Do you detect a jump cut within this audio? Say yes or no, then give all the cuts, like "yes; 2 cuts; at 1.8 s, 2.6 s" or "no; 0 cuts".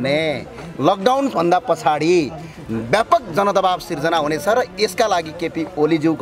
no; 0 cuts